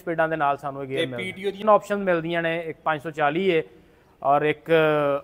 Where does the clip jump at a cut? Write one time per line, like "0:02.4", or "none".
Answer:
0:01.6

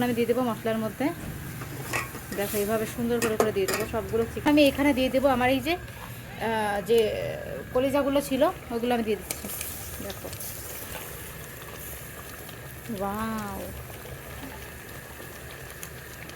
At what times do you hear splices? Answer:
0:04.5

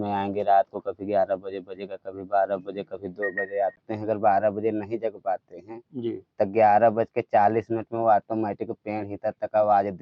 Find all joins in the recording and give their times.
0:03.8

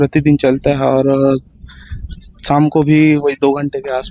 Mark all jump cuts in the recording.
none

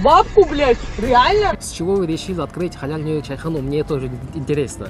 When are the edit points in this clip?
0:01.5

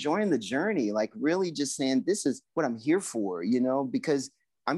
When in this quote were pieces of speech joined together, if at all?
0:02.4

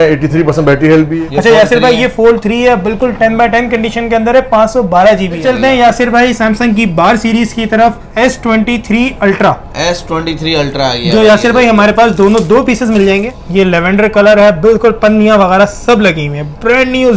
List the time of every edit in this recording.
0:01.1
0:05.4
0:08.1
0:13.4

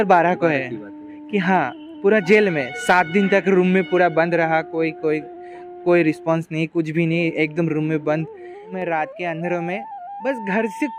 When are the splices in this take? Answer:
0:08.4

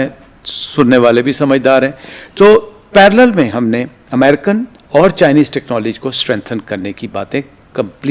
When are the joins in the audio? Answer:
none

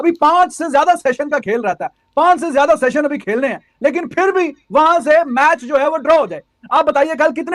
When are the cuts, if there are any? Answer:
none

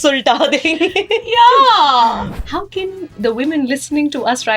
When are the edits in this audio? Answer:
0:02.3

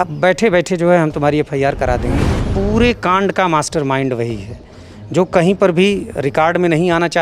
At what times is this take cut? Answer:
0:02.5

